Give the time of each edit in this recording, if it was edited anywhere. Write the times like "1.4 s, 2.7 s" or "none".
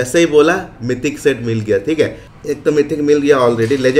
2.3 s